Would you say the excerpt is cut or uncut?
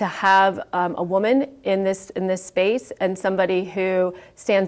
uncut